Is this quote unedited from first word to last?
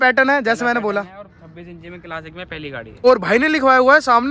no; 1 cut; at 3.0 s

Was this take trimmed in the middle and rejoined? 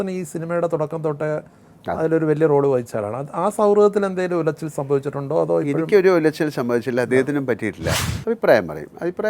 yes; 1 cut; at 7.9 s

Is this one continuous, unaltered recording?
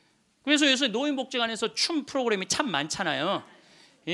yes; 0 cuts

